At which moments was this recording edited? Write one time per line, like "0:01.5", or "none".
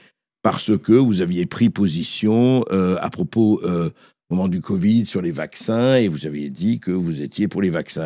none